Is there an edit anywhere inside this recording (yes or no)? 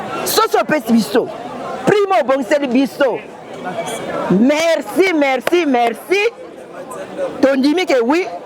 no